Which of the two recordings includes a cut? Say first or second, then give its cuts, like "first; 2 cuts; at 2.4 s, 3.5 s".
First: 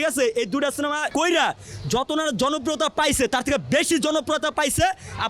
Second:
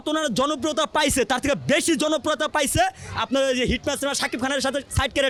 first; 1 cut; at 1.1 s